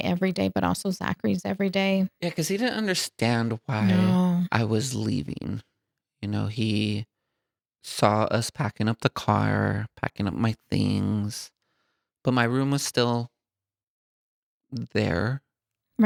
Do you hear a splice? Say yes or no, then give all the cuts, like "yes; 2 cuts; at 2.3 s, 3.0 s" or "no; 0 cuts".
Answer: no; 0 cuts